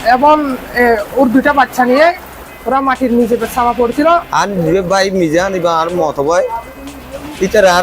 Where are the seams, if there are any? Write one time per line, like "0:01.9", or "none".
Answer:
0:04.3